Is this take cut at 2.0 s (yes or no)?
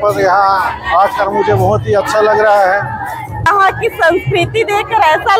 no